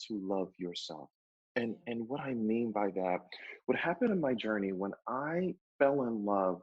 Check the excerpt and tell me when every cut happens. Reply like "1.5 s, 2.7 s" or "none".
5.6 s

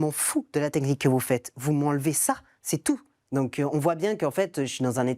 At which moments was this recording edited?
3.1 s

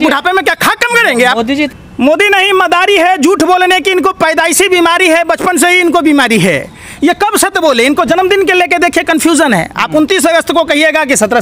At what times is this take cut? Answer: 1.7 s

